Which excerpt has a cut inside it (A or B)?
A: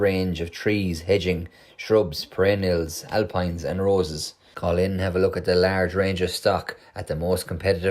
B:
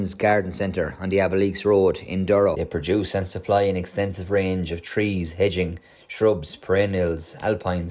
B